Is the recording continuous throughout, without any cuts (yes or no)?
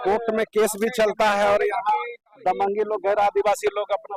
yes